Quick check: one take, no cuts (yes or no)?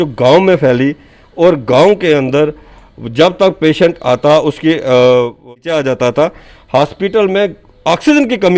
no